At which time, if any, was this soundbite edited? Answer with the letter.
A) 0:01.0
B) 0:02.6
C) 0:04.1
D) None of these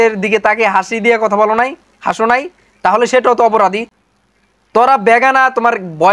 C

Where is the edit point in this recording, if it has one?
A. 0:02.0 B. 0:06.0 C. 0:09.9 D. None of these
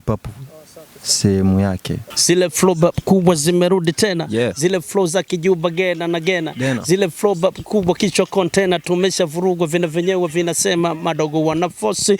A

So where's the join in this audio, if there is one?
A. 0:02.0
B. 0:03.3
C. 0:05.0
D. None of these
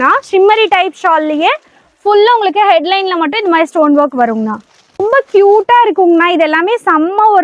C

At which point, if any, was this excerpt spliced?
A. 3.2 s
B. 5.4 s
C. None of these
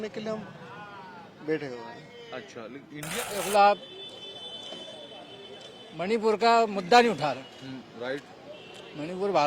A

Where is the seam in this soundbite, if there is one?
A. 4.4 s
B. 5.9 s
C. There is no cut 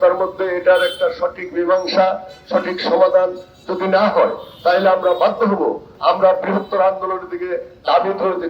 B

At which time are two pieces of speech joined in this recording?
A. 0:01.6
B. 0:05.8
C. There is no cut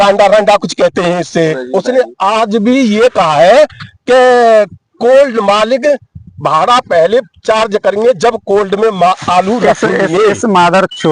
A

